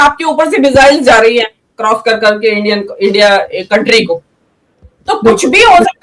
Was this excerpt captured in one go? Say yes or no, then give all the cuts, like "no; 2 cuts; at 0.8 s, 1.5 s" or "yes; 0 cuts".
yes; 0 cuts